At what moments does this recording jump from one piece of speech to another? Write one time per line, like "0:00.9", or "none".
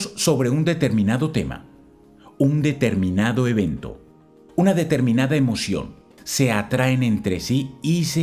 none